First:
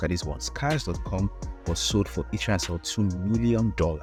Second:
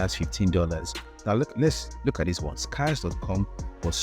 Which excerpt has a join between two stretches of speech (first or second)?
second